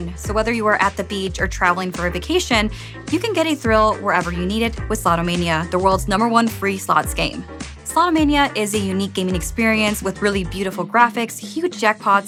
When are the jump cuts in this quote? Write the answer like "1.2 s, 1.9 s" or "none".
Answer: none